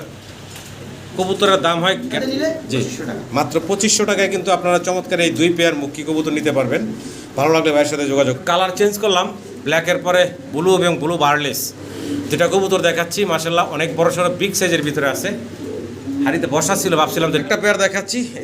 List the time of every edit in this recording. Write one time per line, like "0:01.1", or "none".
0:02.2
0:08.4
0:17.4